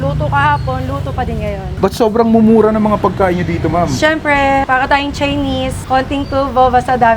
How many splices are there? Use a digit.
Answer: 1